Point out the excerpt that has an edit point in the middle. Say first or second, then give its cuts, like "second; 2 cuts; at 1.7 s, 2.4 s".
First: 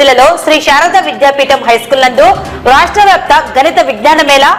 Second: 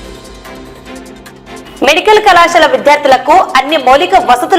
second; 1 cut; at 1.6 s